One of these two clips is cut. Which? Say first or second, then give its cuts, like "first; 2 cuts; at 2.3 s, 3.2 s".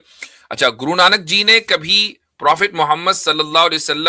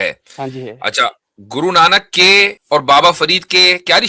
second; 1 cut; at 2.6 s